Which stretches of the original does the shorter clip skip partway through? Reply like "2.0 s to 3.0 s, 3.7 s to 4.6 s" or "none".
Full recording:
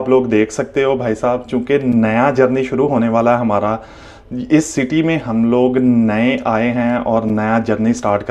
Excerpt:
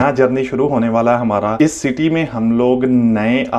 3.7 s to 4.5 s